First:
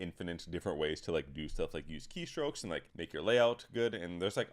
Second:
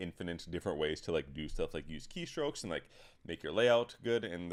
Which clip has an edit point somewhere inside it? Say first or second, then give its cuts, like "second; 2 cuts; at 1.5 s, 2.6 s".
first; 1 cut; at 2.9 s